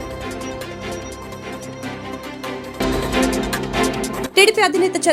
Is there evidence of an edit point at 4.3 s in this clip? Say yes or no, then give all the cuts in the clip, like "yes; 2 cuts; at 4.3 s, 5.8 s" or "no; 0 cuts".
yes; 2 cuts; at 2.8 s, 4.3 s